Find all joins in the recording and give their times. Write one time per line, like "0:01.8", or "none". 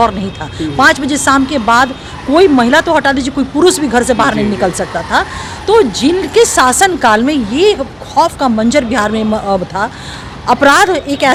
none